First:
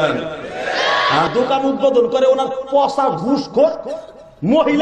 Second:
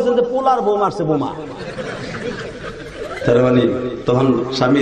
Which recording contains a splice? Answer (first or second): first